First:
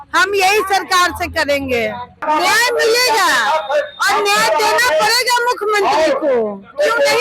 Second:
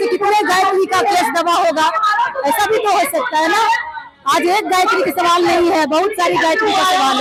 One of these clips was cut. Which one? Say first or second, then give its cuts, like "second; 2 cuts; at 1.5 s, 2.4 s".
first; 1 cut; at 2.2 s